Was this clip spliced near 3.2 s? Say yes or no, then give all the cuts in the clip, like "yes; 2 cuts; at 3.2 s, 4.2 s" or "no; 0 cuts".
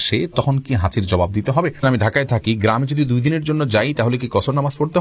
no; 1 cut; at 1.8 s